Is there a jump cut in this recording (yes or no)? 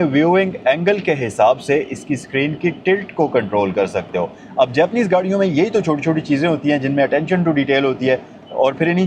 no